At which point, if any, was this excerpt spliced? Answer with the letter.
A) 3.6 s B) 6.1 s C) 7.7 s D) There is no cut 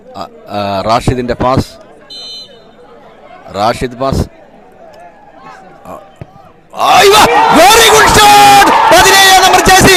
D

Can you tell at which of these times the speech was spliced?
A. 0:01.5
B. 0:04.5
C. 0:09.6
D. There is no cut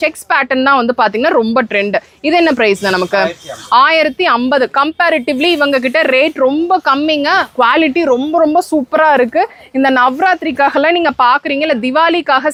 D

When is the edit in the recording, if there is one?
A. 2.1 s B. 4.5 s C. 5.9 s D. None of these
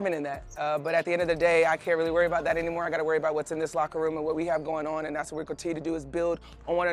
D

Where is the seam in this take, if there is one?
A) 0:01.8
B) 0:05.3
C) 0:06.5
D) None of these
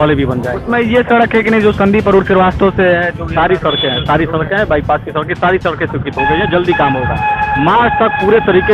D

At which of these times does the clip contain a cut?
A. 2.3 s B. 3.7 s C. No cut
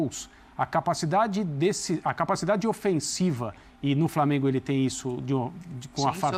C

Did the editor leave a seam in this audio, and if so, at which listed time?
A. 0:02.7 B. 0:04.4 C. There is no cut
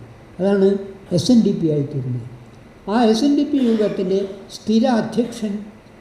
C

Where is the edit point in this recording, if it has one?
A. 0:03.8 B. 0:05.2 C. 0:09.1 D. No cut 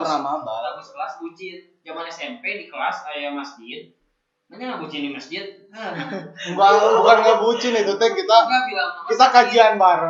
D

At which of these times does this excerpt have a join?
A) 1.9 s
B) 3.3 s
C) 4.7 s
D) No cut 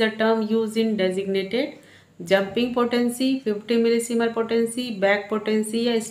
D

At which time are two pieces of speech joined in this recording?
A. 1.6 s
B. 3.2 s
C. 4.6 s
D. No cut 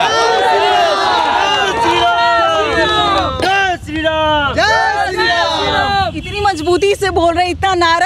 D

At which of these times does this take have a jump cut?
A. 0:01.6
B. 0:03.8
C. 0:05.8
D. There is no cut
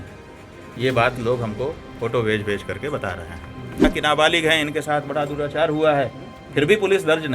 B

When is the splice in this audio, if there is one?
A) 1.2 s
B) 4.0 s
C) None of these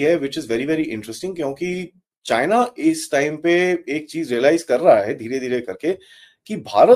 C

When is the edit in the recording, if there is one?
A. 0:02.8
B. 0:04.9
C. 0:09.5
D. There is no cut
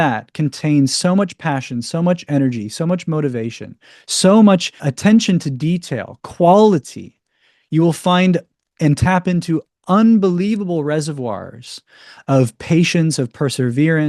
B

